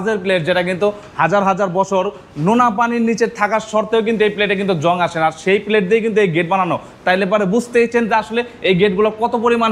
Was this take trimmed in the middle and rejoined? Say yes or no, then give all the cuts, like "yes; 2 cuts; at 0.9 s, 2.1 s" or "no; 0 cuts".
no; 0 cuts